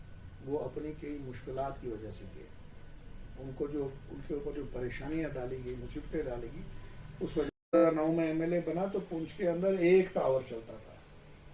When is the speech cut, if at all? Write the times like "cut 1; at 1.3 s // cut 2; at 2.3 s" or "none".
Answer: cut 1; at 7.8 s